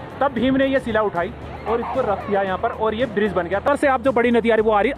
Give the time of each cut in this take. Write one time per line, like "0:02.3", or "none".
0:03.7